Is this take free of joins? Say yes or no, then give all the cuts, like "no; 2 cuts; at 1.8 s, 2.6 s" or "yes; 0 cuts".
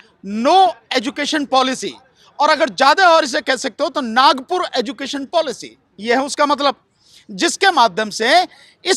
yes; 0 cuts